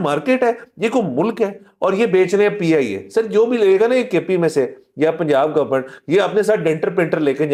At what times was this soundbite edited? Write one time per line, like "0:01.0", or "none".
none